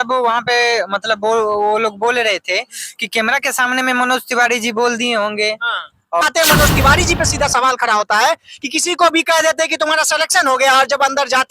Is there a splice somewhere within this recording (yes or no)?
yes